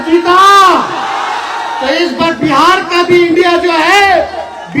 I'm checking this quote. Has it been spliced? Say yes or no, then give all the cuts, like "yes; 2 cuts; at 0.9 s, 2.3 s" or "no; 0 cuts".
no; 0 cuts